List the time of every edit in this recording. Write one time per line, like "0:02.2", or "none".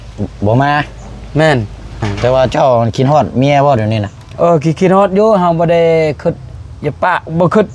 0:02.1